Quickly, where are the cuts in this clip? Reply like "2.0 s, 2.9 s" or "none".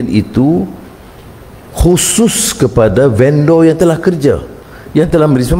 4.6 s